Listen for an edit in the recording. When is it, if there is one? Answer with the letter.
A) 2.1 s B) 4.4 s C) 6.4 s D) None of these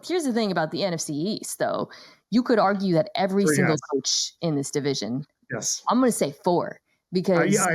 D